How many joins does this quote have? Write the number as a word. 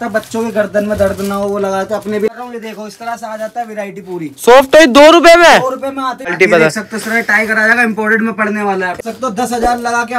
three